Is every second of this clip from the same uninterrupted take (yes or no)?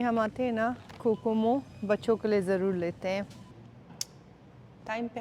no